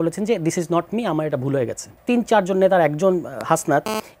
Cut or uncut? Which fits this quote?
cut